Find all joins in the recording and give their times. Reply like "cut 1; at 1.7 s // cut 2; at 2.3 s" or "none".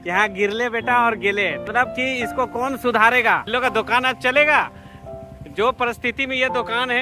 cut 1; at 1.7 s // cut 2; at 3.5 s